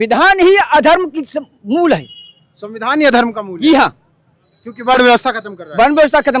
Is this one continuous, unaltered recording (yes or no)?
yes